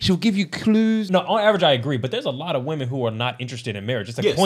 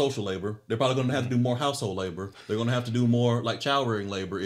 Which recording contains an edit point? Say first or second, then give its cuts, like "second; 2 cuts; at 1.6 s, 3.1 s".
first; 1 cut; at 1.1 s